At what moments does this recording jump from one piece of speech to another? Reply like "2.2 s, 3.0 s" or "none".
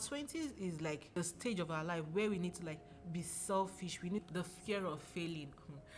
1.2 s, 4.3 s